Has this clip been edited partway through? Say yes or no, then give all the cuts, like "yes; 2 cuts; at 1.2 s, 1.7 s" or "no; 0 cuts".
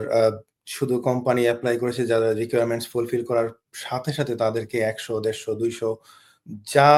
no; 0 cuts